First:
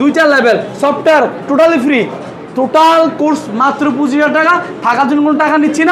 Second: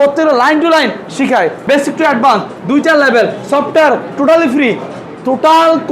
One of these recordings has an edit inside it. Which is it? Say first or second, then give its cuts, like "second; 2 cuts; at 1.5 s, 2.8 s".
second; 1 cut; at 1.6 s